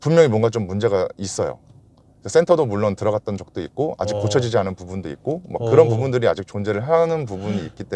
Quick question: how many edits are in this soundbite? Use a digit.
0